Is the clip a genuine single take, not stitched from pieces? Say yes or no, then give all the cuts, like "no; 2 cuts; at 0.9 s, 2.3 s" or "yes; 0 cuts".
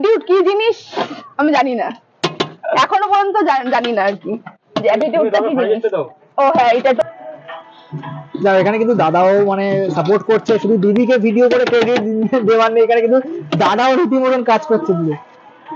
yes; 0 cuts